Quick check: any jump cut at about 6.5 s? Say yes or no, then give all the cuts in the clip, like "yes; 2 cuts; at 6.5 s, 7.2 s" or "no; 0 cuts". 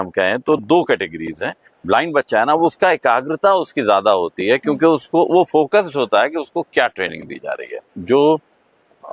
no; 2 cuts; at 1.7 s, 7.9 s